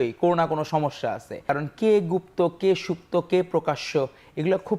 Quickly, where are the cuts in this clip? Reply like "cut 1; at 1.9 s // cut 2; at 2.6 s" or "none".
cut 1; at 1.5 s